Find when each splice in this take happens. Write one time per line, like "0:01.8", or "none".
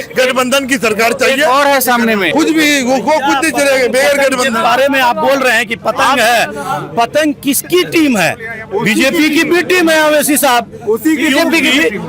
0:02.3